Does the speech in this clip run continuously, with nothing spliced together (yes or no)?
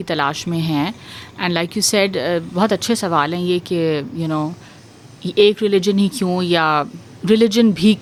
yes